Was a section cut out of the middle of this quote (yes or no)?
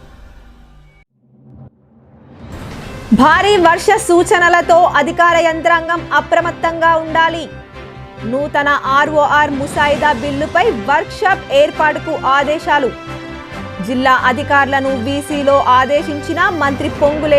yes